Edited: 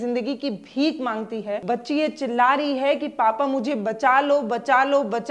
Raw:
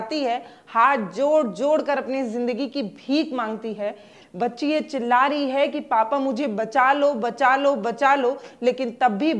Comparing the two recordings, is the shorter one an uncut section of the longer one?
no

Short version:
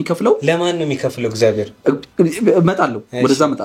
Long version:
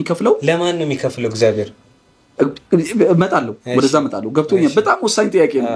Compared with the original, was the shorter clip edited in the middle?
yes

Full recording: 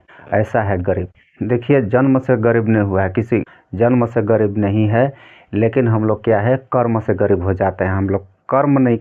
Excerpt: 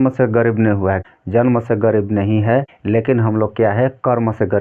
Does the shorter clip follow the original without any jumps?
no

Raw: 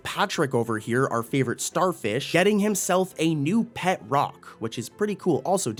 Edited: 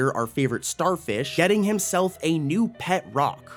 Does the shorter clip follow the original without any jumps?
yes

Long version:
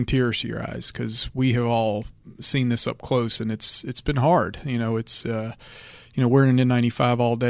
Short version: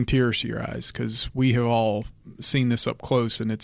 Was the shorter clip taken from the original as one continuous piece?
yes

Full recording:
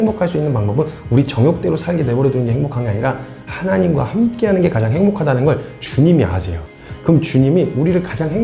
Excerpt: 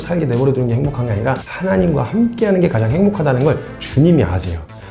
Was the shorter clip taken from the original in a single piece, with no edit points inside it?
no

